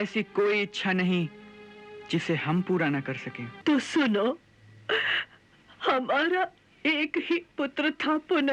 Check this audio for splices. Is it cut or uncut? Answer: cut